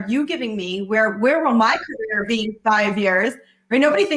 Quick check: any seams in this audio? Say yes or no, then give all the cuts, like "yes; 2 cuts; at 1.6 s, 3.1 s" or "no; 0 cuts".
no; 0 cuts